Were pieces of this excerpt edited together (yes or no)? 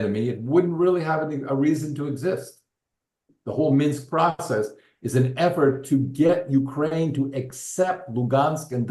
yes